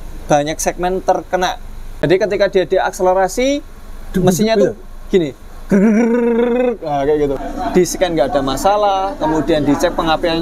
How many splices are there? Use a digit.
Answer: 2